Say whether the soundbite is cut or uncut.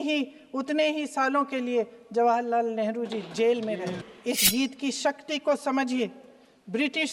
cut